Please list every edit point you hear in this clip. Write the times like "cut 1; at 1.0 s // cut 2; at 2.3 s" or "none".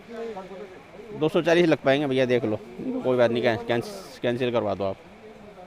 none